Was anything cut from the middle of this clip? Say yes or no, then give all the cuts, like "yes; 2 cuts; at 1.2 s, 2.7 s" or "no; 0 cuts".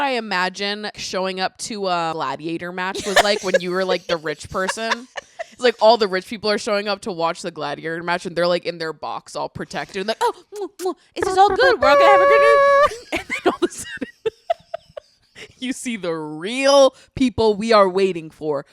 yes; 2 cuts; at 1.0 s, 2.1 s